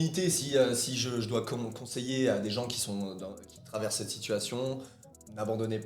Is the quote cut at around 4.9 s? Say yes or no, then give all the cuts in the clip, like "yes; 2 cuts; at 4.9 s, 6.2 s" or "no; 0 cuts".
yes; 1 cut; at 4.9 s